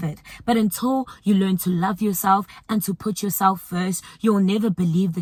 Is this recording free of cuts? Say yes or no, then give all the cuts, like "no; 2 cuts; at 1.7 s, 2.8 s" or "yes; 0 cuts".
yes; 0 cuts